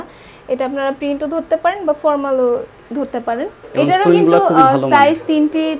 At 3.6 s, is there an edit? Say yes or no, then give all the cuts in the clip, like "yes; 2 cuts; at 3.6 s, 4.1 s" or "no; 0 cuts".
yes; 1 cut; at 3.6 s